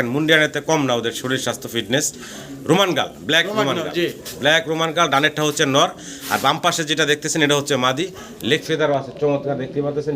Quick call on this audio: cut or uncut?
uncut